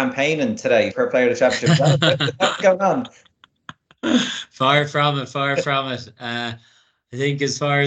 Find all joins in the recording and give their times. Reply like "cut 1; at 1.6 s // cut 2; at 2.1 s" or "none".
cut 1; at 0.9 s